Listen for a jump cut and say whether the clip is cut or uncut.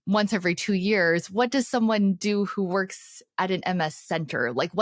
uncut